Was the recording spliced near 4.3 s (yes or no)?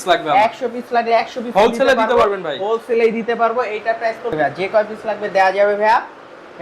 yes